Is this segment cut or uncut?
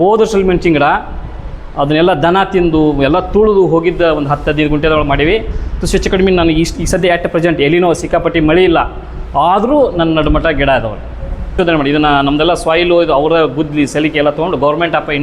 cut